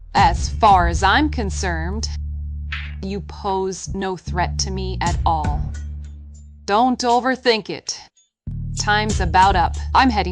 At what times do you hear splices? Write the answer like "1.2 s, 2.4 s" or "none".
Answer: none